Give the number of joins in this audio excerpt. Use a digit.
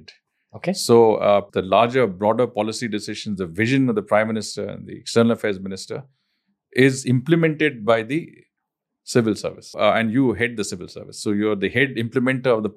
2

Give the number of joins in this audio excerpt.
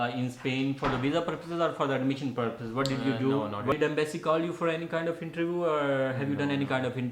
1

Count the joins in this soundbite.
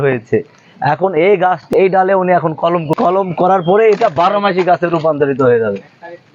2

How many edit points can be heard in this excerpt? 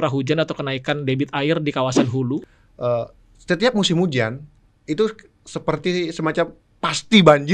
1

